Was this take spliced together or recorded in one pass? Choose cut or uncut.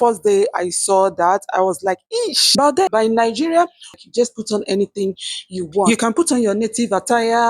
cut